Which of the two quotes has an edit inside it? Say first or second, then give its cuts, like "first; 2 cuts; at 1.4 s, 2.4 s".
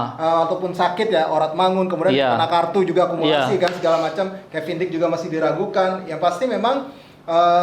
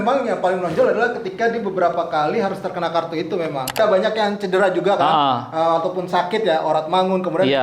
second; 1 cut; at 3.8 s